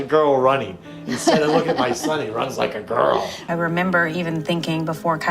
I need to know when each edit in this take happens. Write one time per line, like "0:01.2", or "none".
0:03.4